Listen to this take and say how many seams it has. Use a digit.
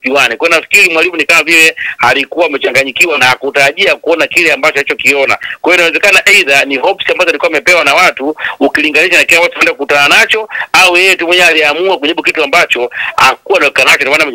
0